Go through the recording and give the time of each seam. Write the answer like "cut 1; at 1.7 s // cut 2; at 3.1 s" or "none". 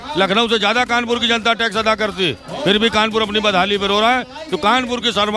none